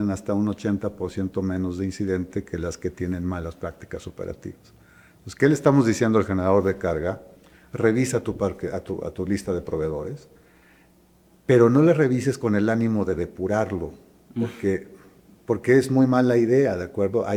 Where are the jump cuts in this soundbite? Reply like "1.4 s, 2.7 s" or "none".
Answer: none